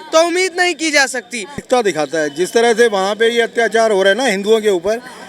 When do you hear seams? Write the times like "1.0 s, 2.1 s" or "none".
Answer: 1.5 s